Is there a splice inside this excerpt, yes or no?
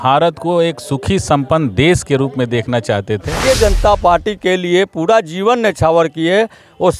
yes